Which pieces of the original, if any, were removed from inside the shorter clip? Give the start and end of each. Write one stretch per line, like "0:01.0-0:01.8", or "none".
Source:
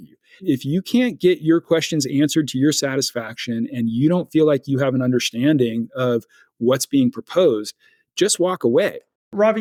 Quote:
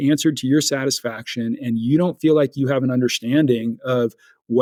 none